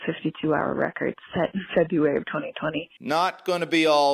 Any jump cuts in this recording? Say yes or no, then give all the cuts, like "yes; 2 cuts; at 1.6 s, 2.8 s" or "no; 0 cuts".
yes; 1 cut; at 2.9 s